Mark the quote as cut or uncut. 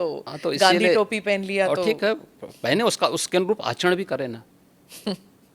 uncut